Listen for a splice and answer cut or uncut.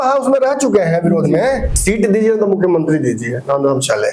cut